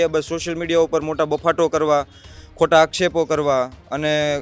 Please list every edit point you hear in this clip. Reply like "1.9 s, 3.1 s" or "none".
none